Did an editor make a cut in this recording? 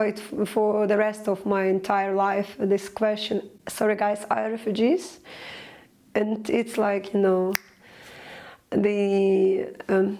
no; 0 cuts

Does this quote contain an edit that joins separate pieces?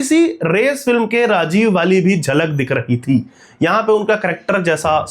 no; 0 cuts

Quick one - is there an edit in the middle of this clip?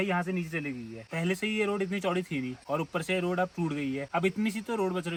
no; 0 cuts

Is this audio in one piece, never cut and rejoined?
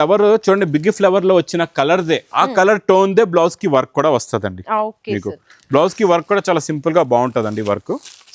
yes; 0 cuts

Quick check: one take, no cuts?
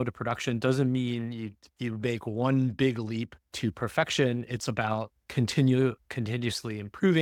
yes; 0 cuts

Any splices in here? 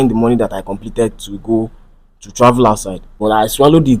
yes; 1 cut; at 3.1 s

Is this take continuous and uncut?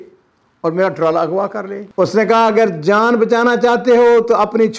no; 1 cut; at 1.8 s

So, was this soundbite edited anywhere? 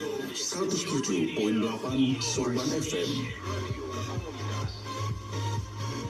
no; 0 cuts

